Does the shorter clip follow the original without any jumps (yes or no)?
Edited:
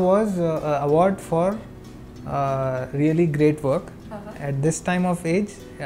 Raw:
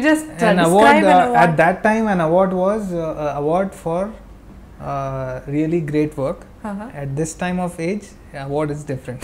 yes